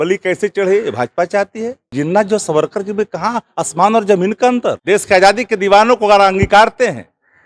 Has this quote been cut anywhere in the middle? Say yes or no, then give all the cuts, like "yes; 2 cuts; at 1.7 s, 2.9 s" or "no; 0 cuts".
yes; 2 cuts; at 1.9 s, 4.8 s